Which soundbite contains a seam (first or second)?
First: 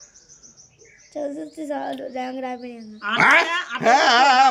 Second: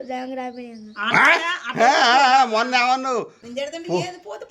second